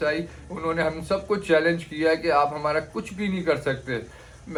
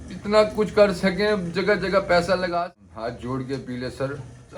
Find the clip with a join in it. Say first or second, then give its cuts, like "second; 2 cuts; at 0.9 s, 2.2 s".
second; 1 cut; at 2.8 s